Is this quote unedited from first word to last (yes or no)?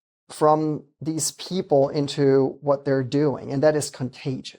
yes